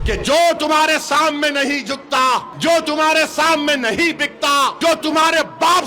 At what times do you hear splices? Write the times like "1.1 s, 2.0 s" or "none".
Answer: 2.5 s, 4.8 s